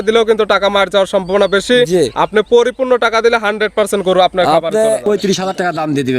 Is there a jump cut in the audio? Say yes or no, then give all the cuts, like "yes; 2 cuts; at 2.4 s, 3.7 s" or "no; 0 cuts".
yes; 1 cut; at 5.0 s